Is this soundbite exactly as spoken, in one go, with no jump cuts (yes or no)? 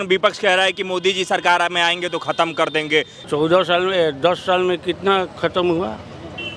no